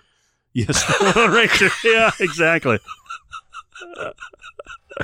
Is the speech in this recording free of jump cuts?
yes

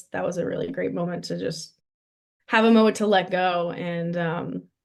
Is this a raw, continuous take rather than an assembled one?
yes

